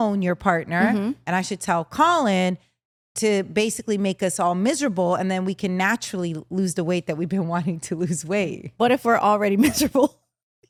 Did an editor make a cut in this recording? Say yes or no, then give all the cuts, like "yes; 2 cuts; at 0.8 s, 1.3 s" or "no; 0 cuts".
no; 0 cuts